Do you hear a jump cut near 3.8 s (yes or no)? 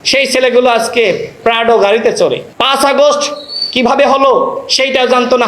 no